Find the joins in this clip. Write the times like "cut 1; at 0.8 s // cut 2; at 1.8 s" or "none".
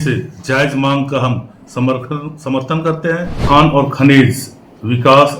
cut 1; at 3.3 s